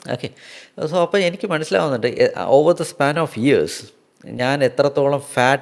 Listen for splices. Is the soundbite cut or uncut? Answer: uncut